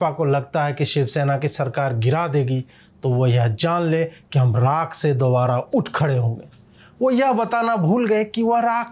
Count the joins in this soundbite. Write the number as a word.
zero